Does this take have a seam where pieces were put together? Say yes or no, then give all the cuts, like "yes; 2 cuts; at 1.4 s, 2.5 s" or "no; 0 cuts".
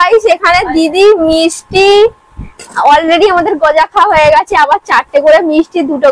no; 0 cuts